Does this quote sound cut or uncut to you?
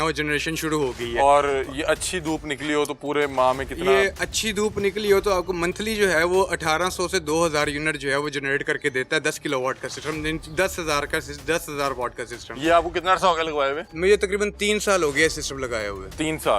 uncut